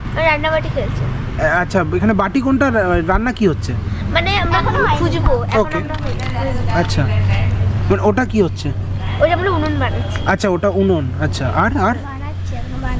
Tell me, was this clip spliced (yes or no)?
no